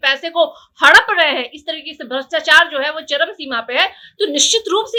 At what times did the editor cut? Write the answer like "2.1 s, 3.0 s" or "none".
none